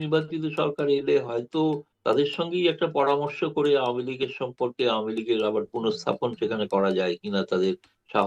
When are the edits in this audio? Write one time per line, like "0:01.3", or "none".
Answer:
0:01.9

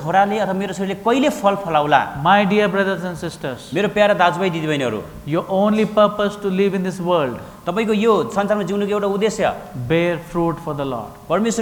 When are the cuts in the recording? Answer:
none

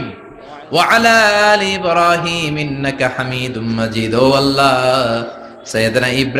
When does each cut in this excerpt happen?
none

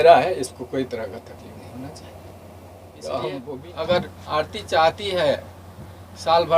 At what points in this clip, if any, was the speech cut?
0:03.6

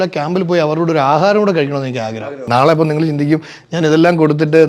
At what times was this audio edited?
0:02.4

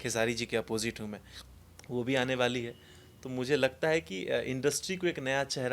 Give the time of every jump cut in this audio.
none

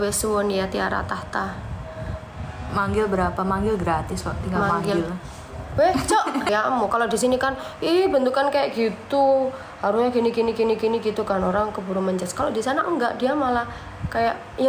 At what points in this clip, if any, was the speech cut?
0:06.5

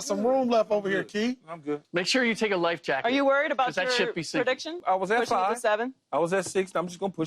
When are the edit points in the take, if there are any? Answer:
0:01.8
0:04.8

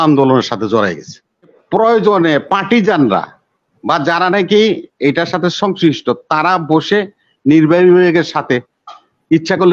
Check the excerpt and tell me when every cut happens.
0:01.6

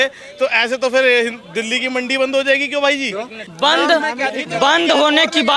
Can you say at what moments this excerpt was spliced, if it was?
0:03.4

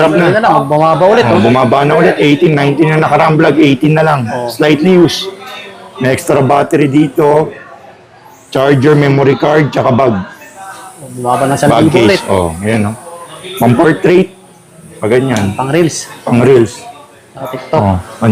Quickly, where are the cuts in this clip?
none

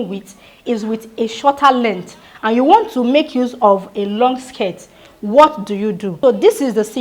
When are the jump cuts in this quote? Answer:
0:06.1

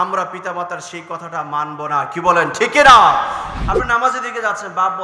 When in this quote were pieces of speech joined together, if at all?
0:03.5

